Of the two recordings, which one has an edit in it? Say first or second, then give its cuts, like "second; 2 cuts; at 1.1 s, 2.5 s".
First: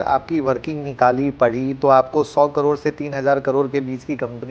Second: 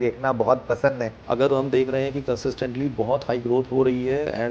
second; 1 cut; at 1.1 s